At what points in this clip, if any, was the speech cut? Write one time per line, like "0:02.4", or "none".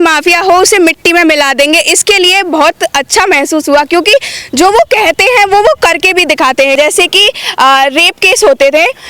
0:06.8